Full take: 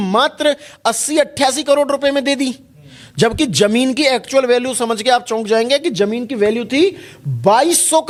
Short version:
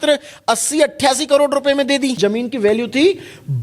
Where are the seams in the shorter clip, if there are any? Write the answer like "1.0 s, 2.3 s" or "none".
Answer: 2.2 s